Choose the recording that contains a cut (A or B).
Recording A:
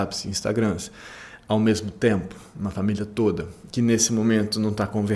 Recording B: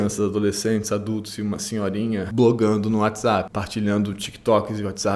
B